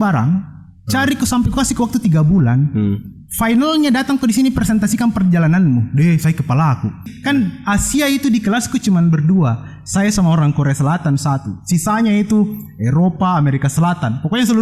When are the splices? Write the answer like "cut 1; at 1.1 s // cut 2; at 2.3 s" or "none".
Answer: cut 1; at 7.1 s

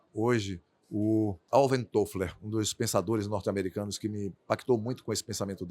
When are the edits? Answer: cut 1; at 1.4 s

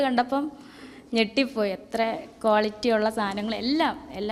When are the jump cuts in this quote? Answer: none

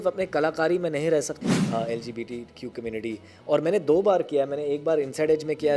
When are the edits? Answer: cut 1; at 1.3 s

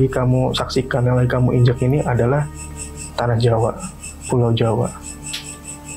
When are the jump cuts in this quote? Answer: none

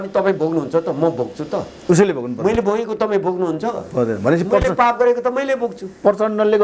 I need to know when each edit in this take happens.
none

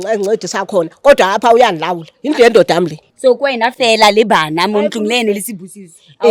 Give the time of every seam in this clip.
cut 1; at 3.0 s

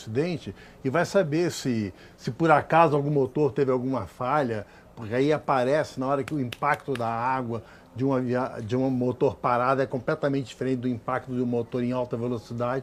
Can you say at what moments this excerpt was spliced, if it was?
none

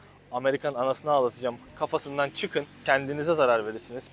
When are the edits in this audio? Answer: cut 1; at 2.8 s

